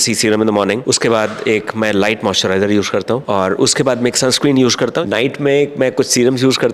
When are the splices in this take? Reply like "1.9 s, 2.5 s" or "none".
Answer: 0.8 s, 3.2 s, 5.0 s